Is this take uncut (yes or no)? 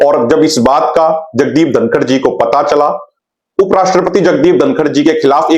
no